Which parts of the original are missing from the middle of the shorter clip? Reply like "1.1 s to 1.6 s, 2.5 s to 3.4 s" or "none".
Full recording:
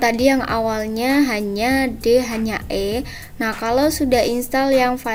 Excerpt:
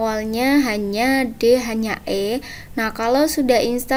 none